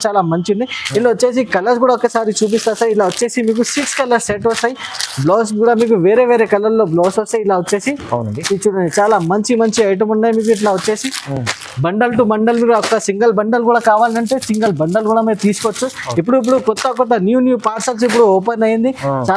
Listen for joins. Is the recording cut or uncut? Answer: uncut